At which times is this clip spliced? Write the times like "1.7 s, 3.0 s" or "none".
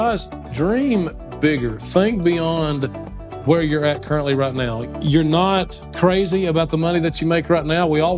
4.8 s